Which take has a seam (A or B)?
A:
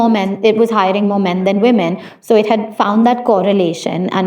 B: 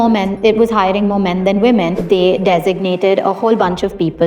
B